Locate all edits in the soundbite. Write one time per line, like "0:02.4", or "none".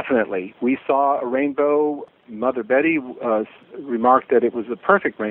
0:02.1
0:03.6

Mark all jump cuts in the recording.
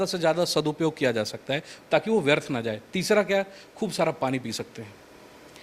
none

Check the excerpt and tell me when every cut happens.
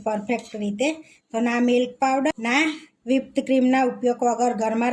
0:02.3

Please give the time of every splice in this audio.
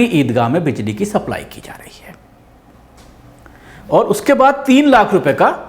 none

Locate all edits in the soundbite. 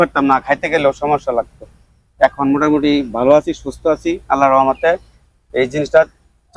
none

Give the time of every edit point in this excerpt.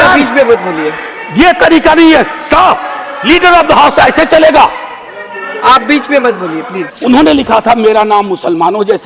0:06.8

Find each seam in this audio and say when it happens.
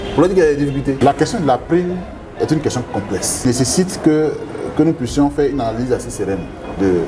0:01.0
0:03.4

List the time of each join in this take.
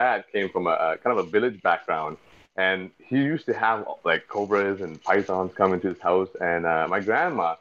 none

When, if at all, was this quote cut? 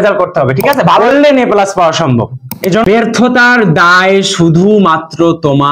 0:01.0
0:02.8

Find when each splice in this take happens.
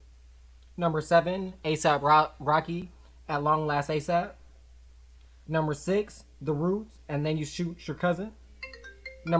none

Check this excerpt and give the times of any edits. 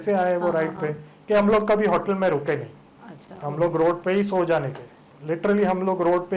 0:05.1

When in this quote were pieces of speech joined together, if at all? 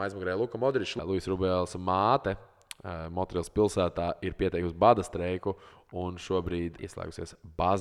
0:00.9
0:06.8

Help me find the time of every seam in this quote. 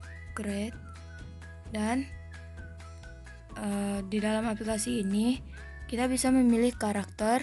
none

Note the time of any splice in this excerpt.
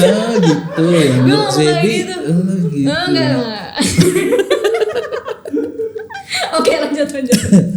none

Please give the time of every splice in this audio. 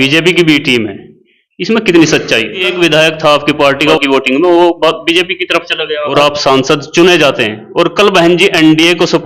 0:02.7
0:04.0
0:06.1

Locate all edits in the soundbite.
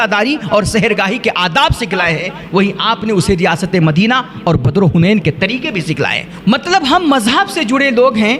0:06.2

